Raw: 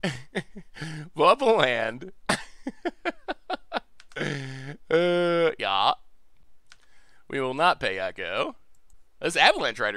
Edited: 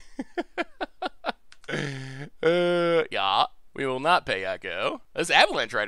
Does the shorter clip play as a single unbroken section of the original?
no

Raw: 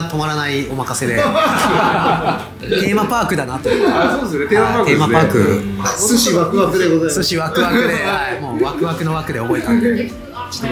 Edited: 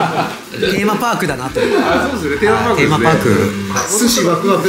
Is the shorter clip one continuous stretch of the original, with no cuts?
yes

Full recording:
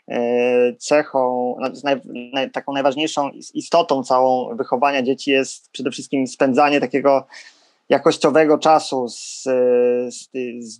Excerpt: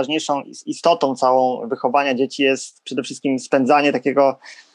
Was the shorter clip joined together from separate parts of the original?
no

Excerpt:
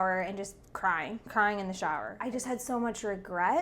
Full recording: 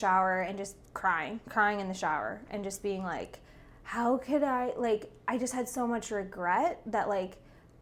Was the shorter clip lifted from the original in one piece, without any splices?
no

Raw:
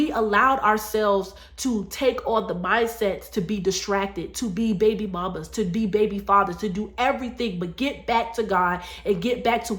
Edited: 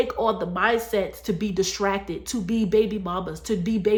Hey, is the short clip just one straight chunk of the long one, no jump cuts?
yes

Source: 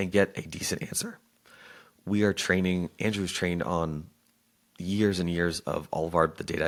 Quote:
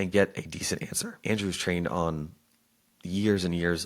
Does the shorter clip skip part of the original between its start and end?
yes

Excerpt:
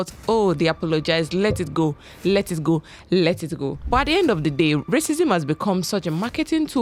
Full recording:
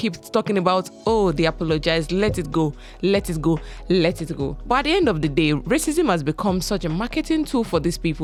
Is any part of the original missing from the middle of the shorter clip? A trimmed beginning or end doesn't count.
no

